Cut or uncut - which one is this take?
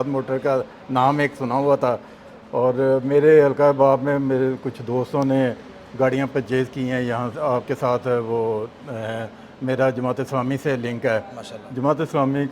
uncut